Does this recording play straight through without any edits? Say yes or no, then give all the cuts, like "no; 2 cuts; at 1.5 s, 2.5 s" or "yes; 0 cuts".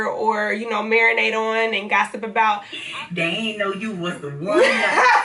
no; 1 cut; at 2.8 s